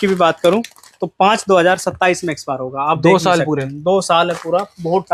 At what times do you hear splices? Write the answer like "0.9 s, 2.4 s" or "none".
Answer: none